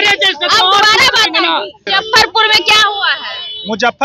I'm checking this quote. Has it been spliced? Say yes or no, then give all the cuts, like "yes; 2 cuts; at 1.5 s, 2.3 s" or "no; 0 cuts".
yes; 1 cut; at 1.9 s